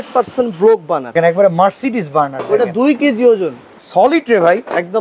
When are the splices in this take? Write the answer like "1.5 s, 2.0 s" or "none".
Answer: 1.1 s, 3.7 s